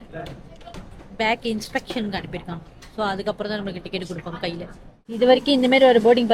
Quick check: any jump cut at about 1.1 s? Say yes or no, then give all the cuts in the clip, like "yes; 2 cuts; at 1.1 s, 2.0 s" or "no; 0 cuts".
no; 1 cut; at 5.0 s